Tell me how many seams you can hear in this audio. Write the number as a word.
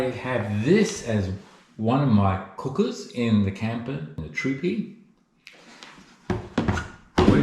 one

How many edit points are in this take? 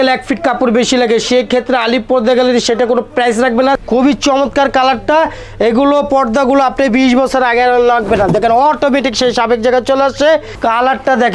two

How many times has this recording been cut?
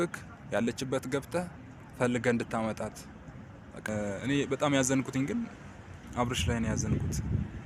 one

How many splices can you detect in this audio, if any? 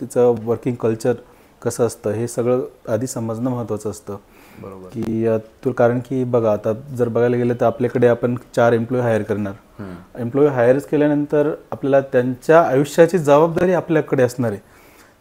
zero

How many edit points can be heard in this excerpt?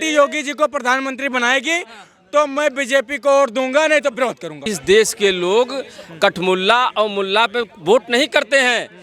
one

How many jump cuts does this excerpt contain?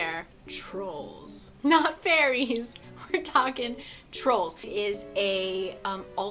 one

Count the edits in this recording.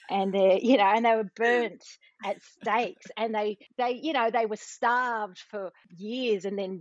zero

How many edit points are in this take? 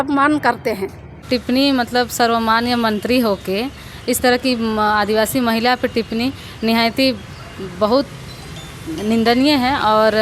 one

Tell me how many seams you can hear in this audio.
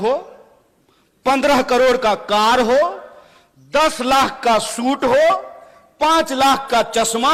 zero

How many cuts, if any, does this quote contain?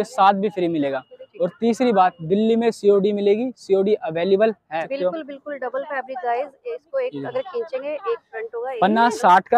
one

